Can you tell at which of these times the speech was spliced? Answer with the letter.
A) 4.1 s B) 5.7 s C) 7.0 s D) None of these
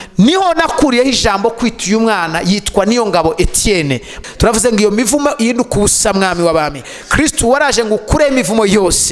A